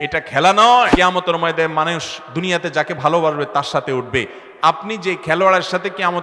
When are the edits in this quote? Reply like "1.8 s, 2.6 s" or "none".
0.9 s